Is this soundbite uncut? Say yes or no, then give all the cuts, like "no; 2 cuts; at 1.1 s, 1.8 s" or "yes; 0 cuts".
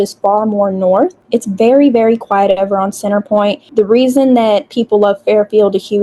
no; 2 cuts; at 1.2 s, 3.6 s